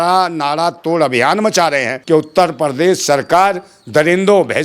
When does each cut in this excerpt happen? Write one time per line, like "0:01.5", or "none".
0:01.9